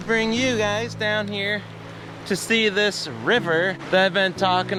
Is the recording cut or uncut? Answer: uncut